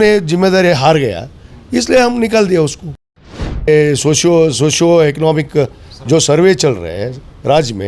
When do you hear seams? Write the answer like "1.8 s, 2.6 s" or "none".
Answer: 3.6 s